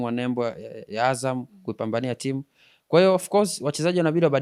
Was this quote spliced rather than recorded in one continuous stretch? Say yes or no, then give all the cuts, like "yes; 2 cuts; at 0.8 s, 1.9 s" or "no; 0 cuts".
no; 0 cuts